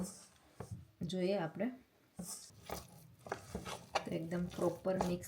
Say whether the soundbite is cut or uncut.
cut